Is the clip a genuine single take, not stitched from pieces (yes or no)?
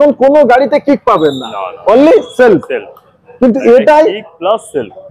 yes